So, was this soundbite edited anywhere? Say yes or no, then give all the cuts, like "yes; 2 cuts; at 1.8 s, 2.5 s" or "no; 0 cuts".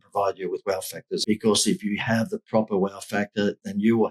yes; 1 cut; at 1.2 s